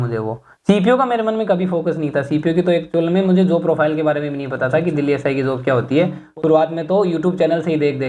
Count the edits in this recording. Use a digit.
1